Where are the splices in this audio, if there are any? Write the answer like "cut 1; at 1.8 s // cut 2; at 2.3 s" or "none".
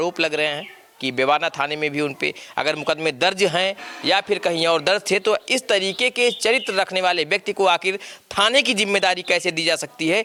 none